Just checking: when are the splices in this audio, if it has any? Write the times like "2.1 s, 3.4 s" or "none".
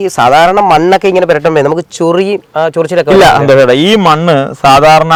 none